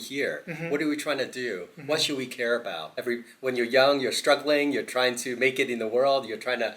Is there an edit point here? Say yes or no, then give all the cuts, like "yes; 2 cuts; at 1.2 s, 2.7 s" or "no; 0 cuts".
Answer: yes; 1 cut; at 3.0 s